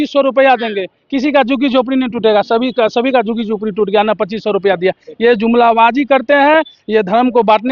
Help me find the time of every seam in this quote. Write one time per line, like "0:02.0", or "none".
none